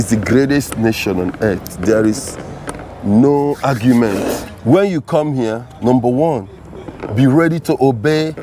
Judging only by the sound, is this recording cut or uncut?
cut